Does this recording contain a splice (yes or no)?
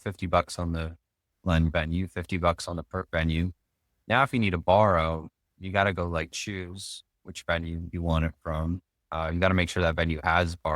no